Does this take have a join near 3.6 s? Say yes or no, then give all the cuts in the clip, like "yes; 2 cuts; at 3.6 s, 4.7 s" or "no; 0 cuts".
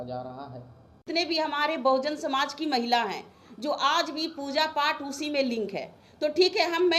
no; 1 cut; at 1.0 s